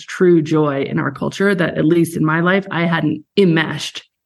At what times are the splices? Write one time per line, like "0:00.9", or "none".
0:03.2